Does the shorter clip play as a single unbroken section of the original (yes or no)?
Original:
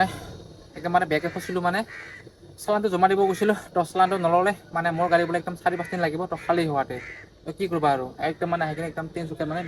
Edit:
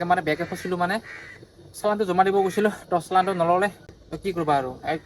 no